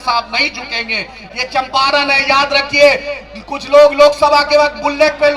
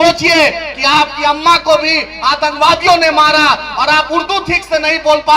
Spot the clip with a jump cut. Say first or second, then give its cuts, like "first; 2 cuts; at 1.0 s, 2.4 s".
first; 1 cut; at 1.2 s